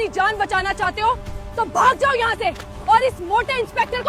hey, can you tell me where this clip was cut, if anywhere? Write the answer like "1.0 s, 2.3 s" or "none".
none